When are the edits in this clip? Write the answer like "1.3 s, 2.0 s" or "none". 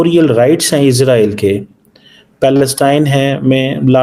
none